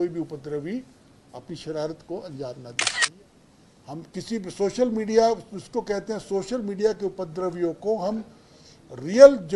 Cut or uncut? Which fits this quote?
cut